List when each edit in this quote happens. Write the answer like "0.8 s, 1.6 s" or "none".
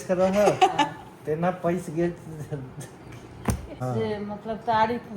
3.8 s